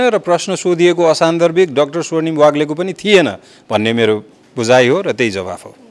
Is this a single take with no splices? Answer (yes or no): yes